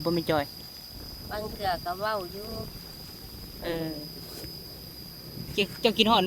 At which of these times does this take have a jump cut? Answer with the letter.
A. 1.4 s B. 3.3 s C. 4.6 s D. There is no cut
D